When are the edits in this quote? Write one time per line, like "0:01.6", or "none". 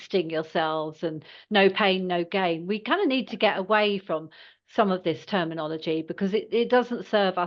none